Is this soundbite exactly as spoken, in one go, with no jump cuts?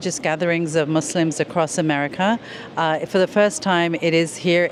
yes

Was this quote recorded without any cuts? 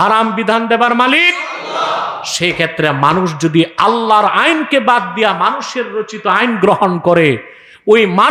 yes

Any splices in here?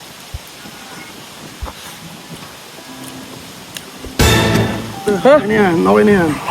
yes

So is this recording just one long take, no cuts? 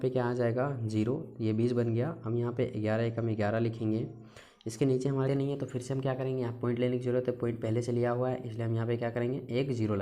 no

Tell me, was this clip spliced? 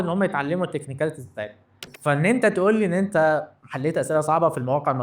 yes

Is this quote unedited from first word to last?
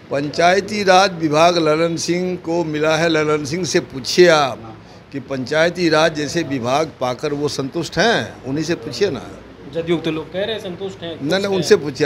yes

